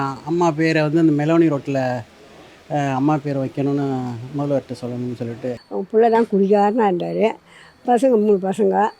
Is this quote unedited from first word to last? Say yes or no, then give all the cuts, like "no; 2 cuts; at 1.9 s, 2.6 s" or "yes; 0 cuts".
no; 1 cut; at 5.6 s